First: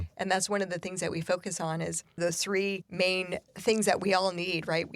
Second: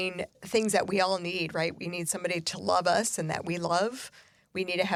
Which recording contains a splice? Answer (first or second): first